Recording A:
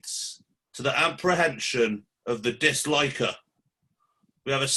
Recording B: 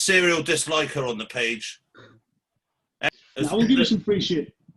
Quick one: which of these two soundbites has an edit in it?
B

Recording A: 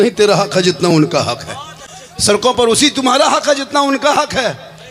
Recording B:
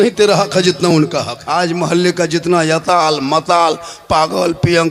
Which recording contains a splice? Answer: B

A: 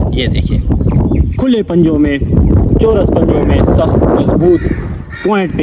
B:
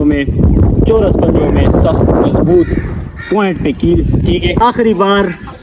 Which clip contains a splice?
B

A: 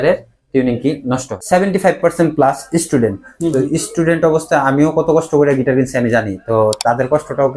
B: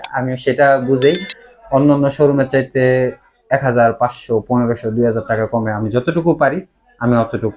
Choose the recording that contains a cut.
A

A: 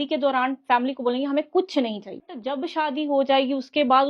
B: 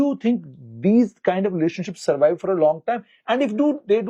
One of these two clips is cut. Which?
A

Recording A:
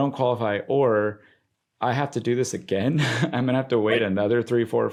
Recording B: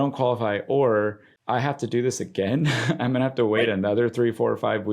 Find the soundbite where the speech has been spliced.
B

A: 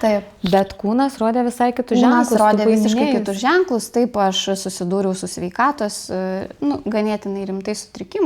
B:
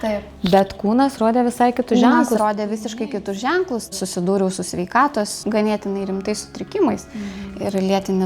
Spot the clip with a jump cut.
B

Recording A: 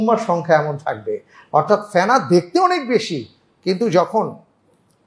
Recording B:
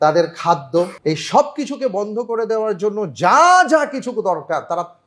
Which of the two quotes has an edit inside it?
B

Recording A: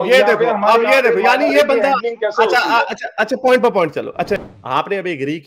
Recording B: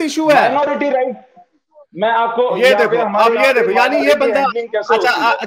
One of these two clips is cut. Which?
A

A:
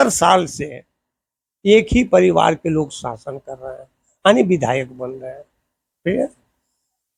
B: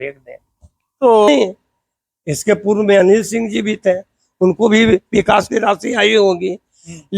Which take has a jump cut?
B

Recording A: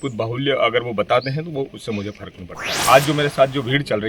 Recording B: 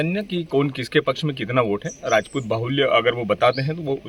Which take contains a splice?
A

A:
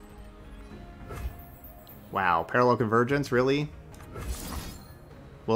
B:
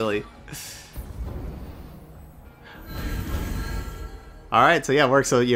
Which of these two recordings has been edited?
A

